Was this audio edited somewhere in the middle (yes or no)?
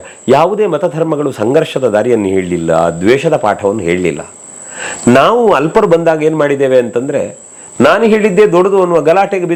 no